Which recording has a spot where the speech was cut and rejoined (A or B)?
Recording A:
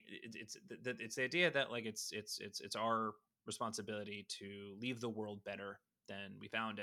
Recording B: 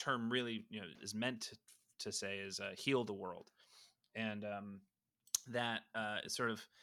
B